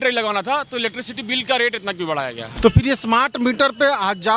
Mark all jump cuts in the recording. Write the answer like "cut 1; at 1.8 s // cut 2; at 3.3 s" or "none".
cut 1; at 2.5 s